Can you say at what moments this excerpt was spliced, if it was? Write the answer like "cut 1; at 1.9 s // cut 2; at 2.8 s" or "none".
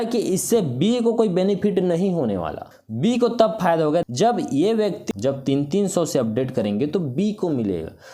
cut 1; at 2.7 s // cut 2; at 4.0 s // cut 3; at 5.0 s